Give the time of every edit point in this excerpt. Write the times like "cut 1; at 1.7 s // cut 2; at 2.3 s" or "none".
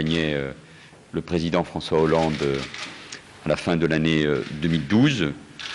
cut 1; at 1.4 s

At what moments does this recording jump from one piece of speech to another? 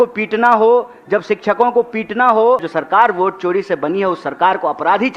cut 1; at 2.7 s

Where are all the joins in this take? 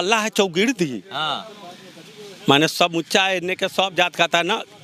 none

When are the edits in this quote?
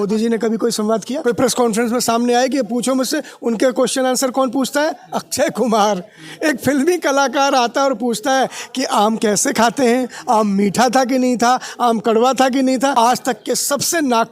cut 1; at 1.2 s // cut 2; at 12.9 s

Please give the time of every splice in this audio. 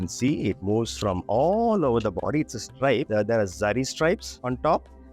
cut 1; at 3.1 s

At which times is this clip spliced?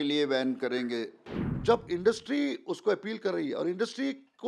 cut 1; at 1.2 s

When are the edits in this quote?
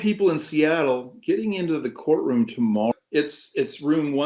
cut 1; at 2.9 s

